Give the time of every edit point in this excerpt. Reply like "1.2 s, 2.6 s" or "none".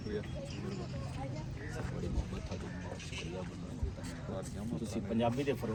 none